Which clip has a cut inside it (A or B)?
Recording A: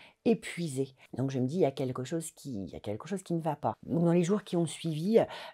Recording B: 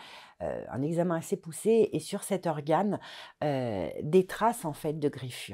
A